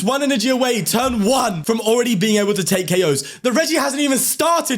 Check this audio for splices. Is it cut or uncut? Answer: cut